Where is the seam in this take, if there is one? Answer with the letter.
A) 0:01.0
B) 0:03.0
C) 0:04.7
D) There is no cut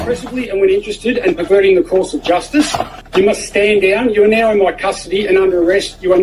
B